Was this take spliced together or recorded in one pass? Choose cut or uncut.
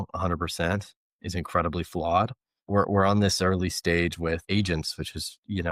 cut